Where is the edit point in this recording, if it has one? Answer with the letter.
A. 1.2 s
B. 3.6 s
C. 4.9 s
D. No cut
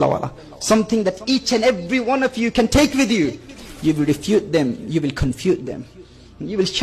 B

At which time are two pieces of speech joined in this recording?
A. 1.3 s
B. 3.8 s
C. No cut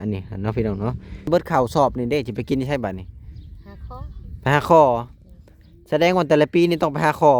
A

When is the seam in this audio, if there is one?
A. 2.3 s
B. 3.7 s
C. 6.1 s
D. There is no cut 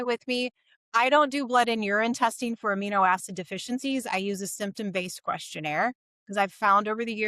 D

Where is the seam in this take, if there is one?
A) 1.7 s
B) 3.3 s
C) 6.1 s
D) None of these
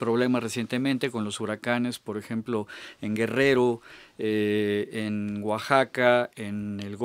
C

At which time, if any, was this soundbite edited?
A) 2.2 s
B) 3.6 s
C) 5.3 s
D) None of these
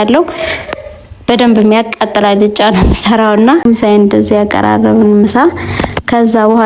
B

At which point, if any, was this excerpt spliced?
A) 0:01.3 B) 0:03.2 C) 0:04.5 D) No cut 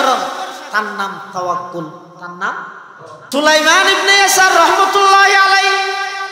B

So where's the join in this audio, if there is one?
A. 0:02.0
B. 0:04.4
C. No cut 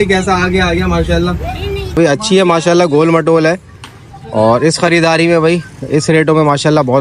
A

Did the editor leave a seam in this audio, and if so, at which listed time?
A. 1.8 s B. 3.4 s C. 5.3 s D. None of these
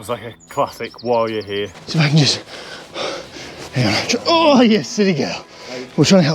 A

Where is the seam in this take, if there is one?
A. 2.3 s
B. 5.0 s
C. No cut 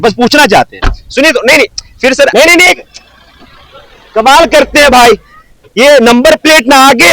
A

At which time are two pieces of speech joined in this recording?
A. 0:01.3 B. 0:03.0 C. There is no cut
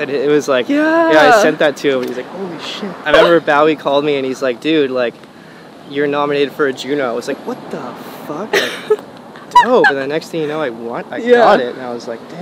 B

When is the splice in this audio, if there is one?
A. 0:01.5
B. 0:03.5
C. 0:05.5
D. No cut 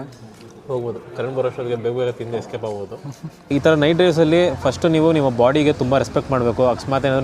B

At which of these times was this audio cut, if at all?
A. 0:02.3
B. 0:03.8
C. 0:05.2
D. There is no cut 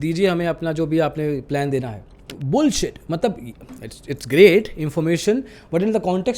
A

